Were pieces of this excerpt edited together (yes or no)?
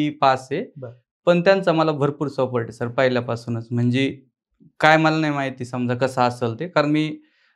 no